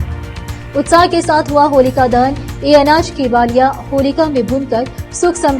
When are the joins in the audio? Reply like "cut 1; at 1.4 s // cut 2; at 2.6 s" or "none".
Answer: none

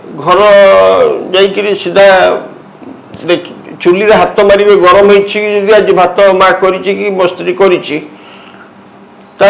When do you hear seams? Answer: none

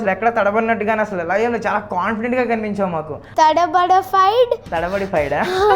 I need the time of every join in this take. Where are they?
cut 1; at 3.2 s // cut 2; at 4.7 s

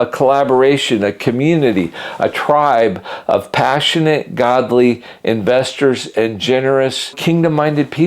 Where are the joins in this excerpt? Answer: cut 1; at 7.2 s

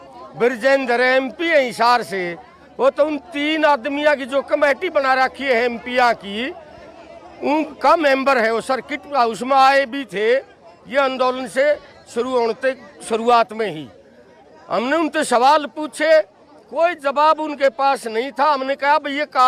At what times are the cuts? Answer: none

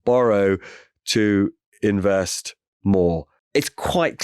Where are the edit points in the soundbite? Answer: cut 1; at 3.3 s

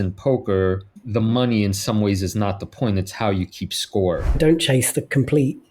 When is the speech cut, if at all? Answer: cut 1; at 0.9 s // cut 2; at 4.4 s

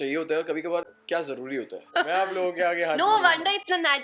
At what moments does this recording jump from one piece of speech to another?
cut 1; at 1.9 s

